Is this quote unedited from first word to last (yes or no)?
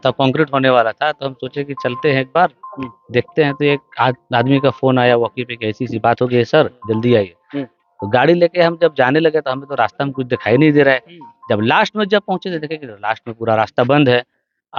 yes